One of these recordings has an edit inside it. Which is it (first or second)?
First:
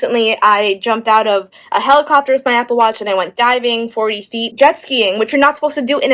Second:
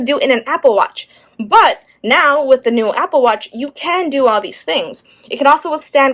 first